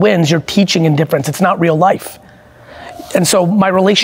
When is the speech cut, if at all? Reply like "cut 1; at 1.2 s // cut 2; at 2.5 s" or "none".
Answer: none